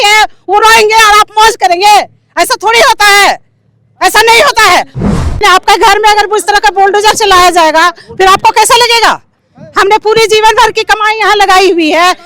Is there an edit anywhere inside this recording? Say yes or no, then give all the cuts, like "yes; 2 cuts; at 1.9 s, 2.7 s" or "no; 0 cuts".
yes; 1 cut; at 5.2 s